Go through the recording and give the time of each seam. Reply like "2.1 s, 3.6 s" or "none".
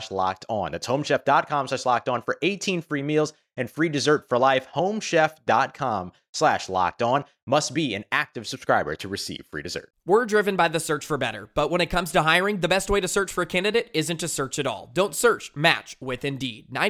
9.9 s